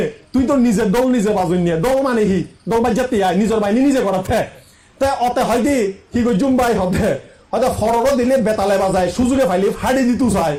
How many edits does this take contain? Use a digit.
0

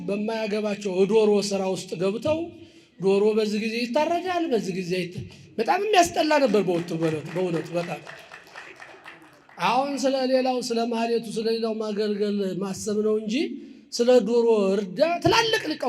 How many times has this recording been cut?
0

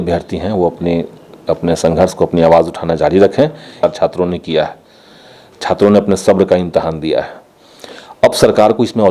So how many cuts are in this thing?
1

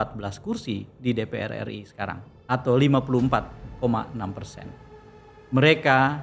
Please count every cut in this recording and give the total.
0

